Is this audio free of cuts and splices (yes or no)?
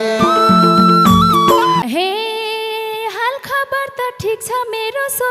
no